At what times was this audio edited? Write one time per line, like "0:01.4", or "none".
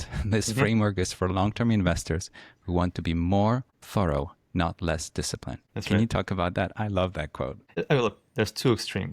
0:03.8
0:05.7
0:07.8